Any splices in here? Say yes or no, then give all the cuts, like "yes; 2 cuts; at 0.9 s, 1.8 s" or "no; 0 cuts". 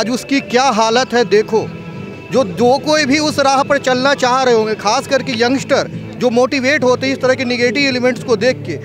no; 0 cuts